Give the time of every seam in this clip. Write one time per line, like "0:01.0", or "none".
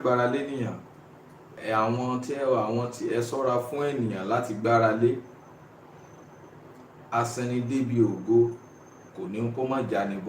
0:01.5